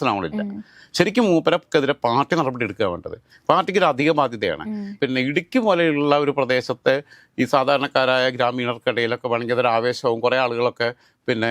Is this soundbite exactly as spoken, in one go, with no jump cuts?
yes; 0 cuts

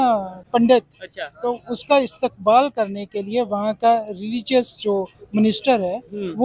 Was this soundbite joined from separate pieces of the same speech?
no; 0 cuts

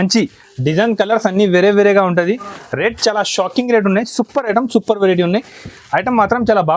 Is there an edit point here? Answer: no; 0 cuts

